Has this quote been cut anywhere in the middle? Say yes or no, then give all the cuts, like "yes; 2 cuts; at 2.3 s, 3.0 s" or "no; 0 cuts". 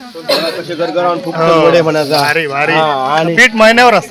no; 0 cuts